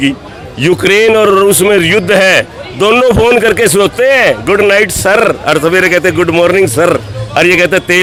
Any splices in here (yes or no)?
no